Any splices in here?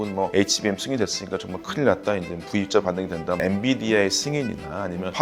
yes; 1 cut; at 3.4 s

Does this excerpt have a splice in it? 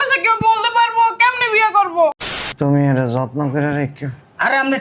yes; 1 cut; at 2.2 s

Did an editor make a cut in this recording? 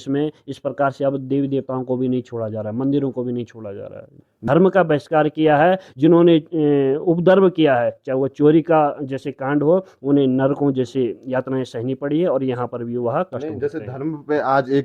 no; 0 cuts

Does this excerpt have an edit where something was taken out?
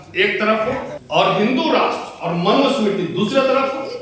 yes; 1 cut; at 1.0 s

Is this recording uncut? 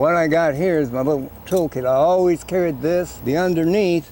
no; 1 cut; at 3.1 s

